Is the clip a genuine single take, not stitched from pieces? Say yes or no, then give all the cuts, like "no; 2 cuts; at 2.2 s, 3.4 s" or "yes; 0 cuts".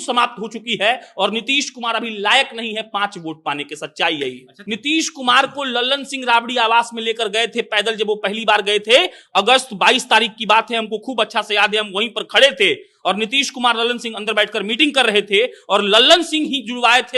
no; 1 cut; at 4.5 s